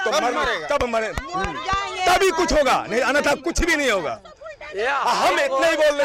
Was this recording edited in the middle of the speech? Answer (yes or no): no